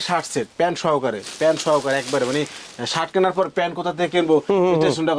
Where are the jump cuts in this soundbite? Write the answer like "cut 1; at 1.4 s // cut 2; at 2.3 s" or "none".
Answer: none